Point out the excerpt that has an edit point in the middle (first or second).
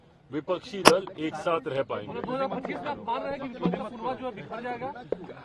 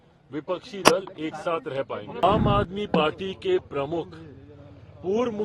second